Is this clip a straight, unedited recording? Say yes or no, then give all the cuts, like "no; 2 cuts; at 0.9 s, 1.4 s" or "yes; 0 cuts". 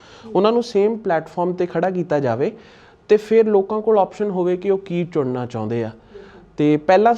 yes; 0 cuts